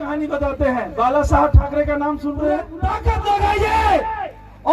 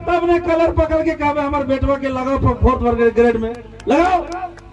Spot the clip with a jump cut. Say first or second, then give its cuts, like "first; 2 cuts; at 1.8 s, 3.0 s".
first; 1 cut; at 2.8 s